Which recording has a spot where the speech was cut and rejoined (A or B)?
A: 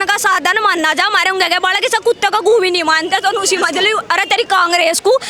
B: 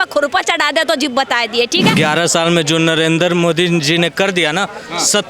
B